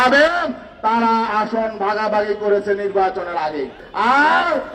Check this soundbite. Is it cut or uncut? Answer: cut